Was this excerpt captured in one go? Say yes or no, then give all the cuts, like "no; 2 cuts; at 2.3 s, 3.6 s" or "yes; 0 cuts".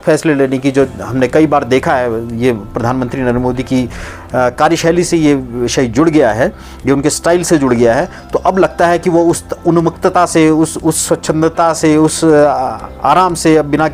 yes; 0 cuts